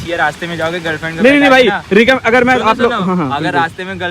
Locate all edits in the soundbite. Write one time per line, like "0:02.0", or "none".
none